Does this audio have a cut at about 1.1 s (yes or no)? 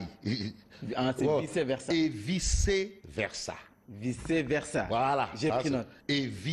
yes